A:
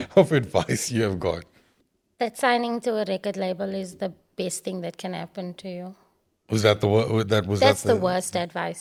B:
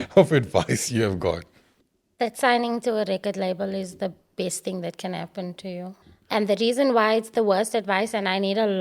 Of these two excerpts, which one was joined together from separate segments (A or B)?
B